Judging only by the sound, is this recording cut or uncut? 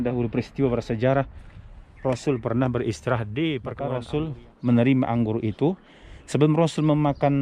cut